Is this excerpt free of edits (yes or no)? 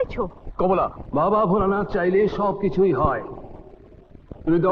no